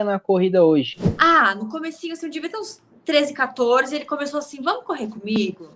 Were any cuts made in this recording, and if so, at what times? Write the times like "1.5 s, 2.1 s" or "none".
1.0 s